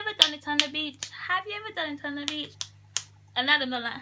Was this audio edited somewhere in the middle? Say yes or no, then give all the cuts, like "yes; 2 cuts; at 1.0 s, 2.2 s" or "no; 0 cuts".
no; 0 cuts